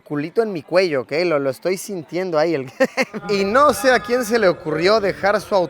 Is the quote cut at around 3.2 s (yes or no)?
yes